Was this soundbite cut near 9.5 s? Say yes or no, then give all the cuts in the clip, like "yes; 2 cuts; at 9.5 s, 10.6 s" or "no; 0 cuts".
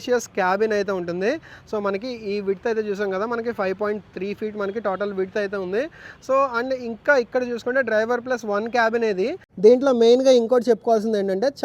yes; 1 cut; at 9.5 s